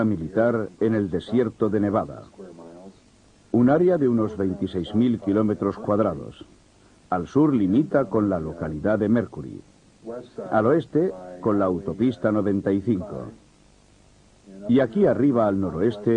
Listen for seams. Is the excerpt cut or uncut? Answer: uncut